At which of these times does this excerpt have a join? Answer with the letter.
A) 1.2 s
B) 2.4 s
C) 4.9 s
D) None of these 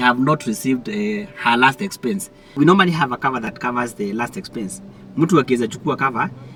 D